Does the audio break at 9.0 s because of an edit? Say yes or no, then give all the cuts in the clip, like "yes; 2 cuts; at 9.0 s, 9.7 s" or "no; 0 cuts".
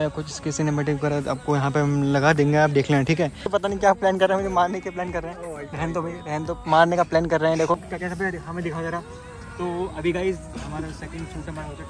no; 2 cuts; at 3.5 s, 7.8 s